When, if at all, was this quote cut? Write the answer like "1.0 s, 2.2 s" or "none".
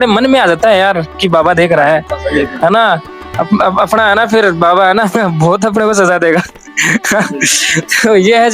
none